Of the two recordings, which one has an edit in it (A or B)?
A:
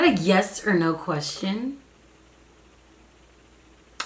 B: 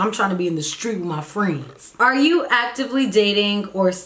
B